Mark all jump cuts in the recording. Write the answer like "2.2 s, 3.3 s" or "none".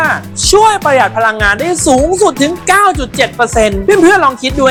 none